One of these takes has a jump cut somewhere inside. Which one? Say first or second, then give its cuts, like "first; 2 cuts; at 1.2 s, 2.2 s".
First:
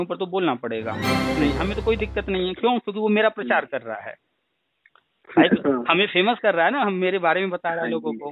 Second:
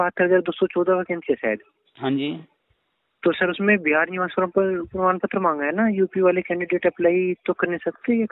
first; 1 cut; at 1.3 s